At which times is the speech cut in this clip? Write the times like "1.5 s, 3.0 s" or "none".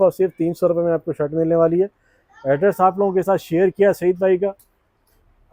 none